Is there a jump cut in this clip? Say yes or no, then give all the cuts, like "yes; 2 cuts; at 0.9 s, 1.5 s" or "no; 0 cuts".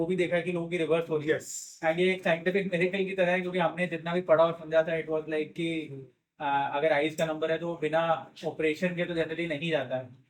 no; 0 cuts